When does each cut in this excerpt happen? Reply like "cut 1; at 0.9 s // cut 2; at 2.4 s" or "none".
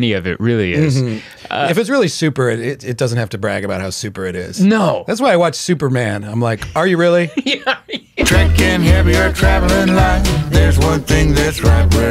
cut 1; at 8.2 s